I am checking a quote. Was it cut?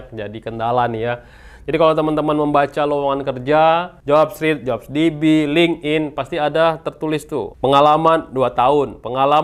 yes; 2 cuts; at 3.9 s, 7.5 s

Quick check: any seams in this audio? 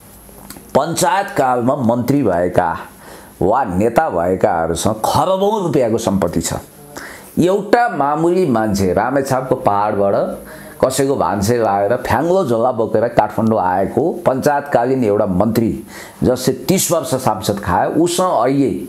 no; 0 cuts

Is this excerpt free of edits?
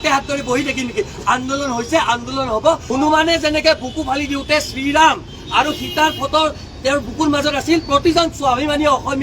no; 1 cut; at 2.8 s

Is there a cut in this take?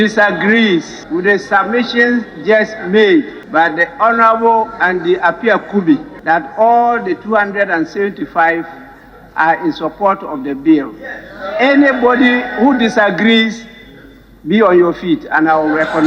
yes; 3 cuts; at 1.0 s, 3.4 s, 6.1 s

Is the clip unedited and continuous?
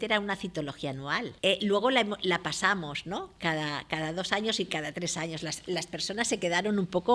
no; 1 cut; at 1.3 s

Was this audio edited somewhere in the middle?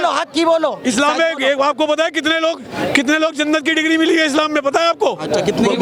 no; 0 cuts

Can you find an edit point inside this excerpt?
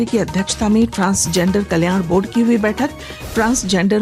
no; 0 cuts

